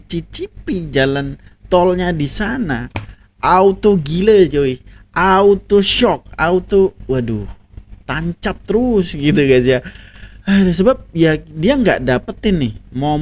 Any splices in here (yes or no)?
no